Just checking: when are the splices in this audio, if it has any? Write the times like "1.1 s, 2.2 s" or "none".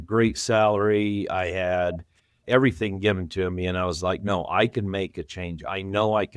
2.4 s